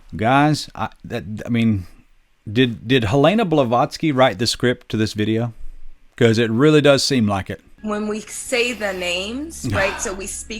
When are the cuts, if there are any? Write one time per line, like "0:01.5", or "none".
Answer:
0:07.7